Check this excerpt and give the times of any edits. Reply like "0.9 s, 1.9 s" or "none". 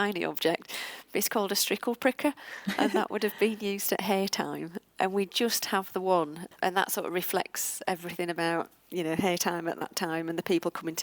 4.8 s, 6.5 s